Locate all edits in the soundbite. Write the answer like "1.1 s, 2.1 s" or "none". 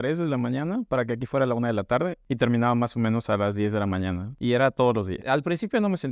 4.3 s, 5.2 s